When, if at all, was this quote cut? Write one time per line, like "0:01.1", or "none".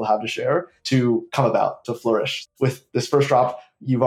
0:01.0
0:02.4

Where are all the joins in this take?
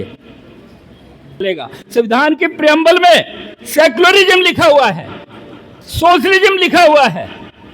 0:01.4

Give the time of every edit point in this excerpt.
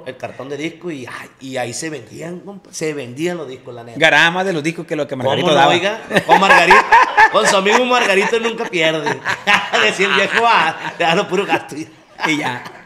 none

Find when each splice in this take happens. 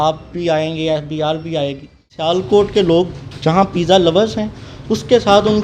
0:02.1

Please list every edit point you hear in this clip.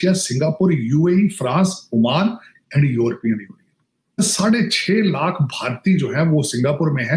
0:04.2

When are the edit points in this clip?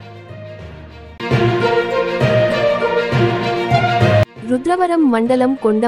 0:01.1
0:04.2

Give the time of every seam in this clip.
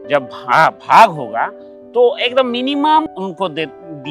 0:03.1

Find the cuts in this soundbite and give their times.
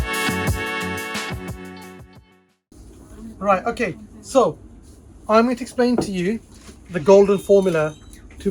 0:02.5

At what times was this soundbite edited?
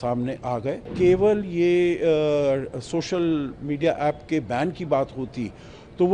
0:00.9

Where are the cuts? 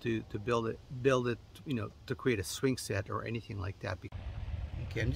0:04.1

